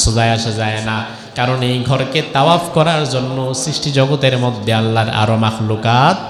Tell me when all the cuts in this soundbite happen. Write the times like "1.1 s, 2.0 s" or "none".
none